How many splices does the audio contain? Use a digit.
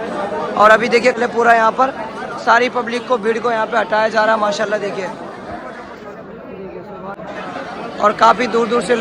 2